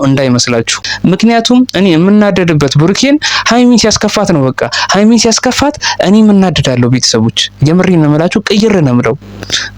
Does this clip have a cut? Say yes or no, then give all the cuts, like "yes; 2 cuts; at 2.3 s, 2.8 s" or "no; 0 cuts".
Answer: no; 0 cuts